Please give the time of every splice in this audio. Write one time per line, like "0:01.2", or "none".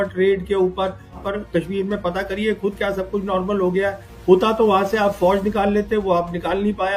0:01.2

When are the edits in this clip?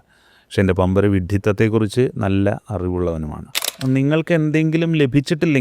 0:03.7

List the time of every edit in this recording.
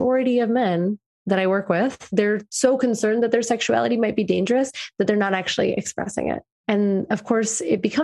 0:01.1
0:02.1
0:06.5

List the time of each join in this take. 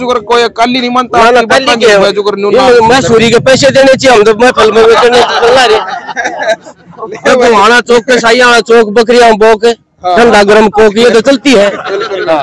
none

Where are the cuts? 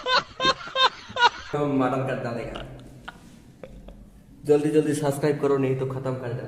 0:01.5
0:03.7

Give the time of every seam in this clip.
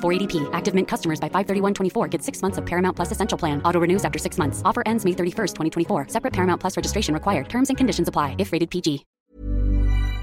0:09.1

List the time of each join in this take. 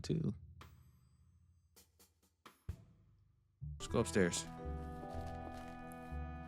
0:03.8

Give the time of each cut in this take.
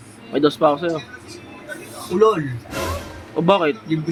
none

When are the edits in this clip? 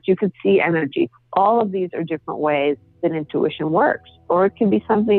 0:04.3

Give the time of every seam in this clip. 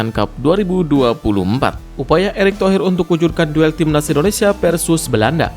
0:01.9

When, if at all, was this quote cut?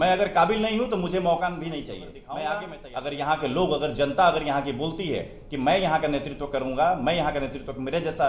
0:02.8

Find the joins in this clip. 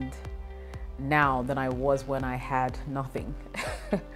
none

